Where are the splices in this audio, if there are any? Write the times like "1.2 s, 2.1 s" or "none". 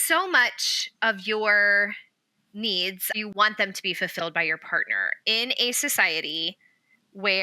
3.2 s